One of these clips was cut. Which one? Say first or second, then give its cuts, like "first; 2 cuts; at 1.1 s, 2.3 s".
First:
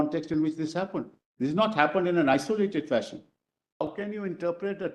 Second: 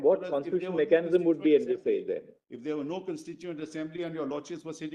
first; 1 cut; at 3.8 s